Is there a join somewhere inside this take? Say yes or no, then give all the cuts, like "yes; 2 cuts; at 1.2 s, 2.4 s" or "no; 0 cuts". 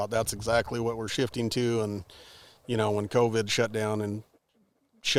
no; 0 cuts